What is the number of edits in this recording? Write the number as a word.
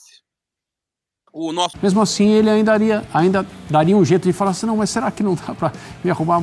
one